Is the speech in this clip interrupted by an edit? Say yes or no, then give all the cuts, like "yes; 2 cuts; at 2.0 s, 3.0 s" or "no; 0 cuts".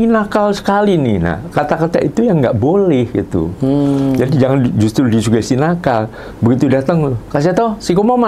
no; 0 cuts